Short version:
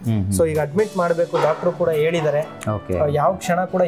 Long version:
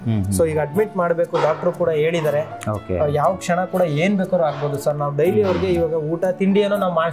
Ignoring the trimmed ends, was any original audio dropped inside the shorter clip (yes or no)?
no